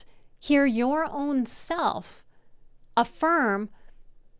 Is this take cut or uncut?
uncut